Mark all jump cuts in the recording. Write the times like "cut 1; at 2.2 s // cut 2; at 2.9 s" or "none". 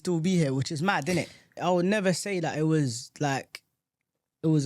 cut 1; at 1.6 s